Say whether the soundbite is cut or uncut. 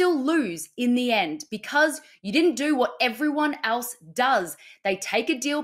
cut